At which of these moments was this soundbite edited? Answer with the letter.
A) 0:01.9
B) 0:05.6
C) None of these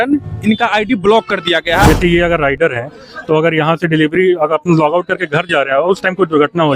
A